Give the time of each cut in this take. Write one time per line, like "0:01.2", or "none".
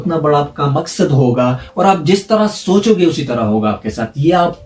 0:01.7